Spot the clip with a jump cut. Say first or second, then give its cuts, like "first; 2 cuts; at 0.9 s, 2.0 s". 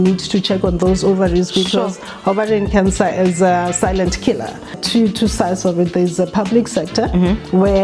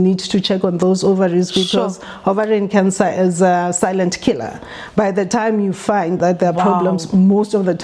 first; 1 cut; at 4.8 s